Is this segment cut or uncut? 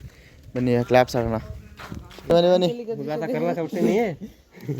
cut